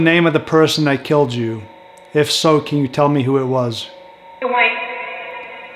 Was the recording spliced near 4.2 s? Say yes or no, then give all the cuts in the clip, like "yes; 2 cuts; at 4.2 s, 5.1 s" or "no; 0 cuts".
no; 0 cuts